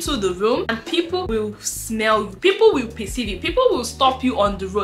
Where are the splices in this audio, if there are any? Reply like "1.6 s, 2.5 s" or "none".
0.9 s